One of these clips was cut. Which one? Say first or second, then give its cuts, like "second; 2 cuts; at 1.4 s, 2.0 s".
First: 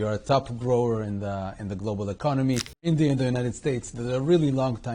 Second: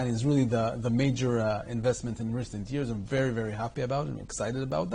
first; 1 cut; at 2.8 s